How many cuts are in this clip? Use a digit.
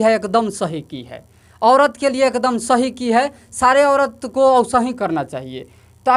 0